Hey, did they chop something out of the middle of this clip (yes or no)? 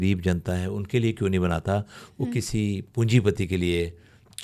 yes